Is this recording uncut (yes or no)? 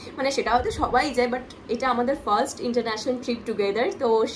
yes